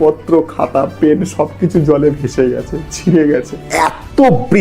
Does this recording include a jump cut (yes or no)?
yes